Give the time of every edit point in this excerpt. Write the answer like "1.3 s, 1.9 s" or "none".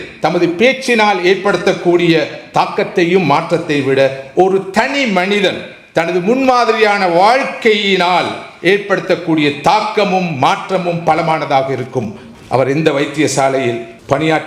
12.2 s